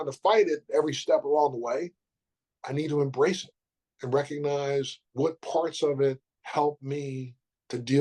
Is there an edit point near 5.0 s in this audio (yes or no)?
yes